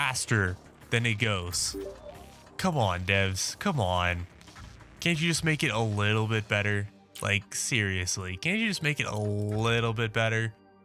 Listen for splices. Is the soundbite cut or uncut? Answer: uncut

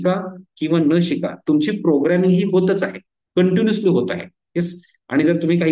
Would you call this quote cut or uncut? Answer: uncut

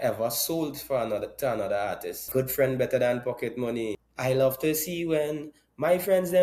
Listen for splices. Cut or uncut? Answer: cut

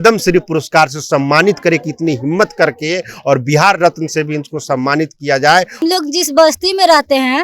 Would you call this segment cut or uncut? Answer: cut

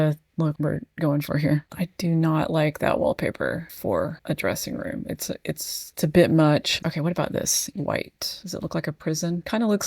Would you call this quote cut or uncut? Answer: cut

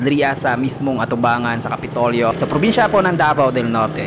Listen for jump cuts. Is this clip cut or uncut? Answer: cut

